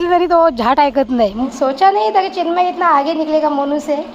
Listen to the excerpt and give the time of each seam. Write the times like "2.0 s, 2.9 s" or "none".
1.4 s